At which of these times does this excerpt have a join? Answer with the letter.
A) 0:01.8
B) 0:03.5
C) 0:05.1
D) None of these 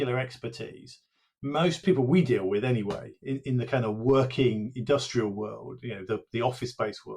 A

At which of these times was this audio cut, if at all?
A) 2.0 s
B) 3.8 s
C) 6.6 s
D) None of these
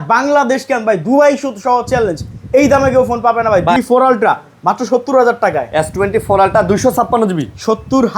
B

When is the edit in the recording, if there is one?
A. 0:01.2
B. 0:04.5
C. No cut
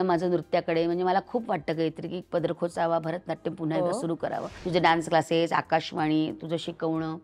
B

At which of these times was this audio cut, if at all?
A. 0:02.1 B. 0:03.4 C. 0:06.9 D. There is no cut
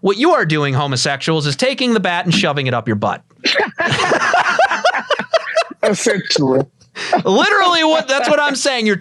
B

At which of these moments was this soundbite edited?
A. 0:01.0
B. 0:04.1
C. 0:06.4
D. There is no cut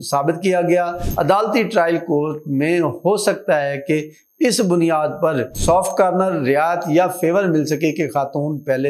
A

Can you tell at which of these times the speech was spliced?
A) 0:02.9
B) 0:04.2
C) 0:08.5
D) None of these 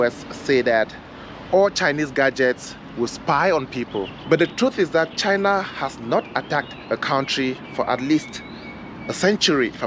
B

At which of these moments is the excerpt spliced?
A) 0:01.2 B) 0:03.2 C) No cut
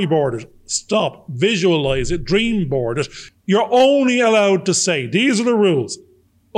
B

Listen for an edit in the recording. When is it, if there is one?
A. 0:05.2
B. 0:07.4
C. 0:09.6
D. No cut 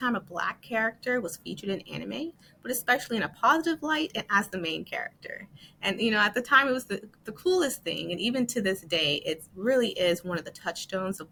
D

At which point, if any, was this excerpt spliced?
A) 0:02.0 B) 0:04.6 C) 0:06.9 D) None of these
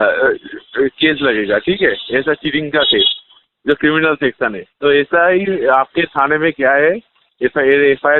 D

